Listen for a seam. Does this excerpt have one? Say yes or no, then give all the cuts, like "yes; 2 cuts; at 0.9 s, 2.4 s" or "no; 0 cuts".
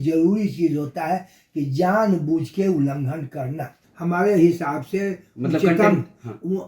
yes; 1 cut; at 3.7 s